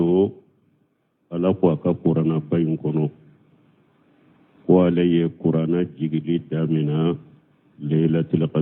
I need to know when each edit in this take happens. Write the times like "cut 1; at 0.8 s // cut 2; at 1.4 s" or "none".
cut 1; at 4.9 s